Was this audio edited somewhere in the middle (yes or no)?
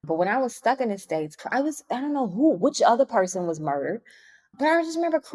no